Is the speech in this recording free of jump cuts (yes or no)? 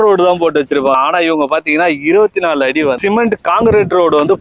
no